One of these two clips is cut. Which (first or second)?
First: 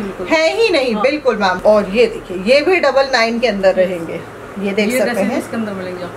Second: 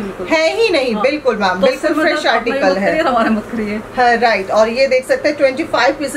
first